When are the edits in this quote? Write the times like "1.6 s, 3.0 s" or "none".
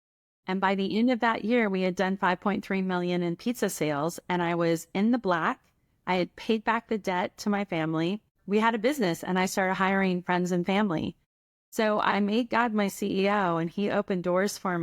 8.3 s, 12.1 s

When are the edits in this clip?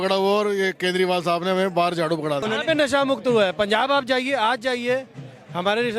2.4 s

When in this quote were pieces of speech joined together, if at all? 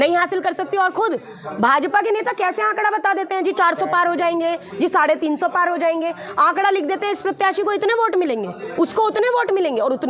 none

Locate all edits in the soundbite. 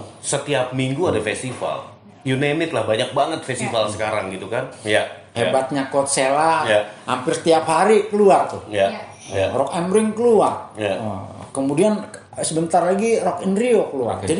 4.7 s

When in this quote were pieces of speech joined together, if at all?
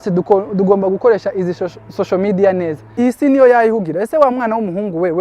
2.9 s

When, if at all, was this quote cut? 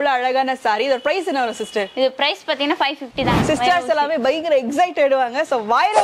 3.4 s

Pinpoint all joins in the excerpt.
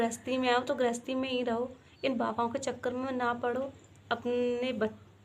none

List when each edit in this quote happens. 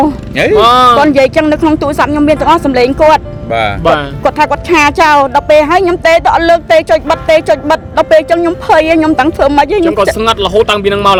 none

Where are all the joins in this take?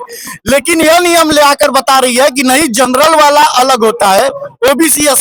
none

